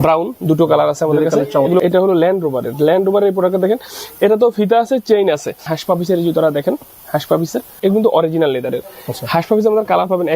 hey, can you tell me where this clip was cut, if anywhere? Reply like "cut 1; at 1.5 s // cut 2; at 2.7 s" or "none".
cut 1; at 1.8 s // cut 2; at 5.7 s // cut 3; at 7.7 s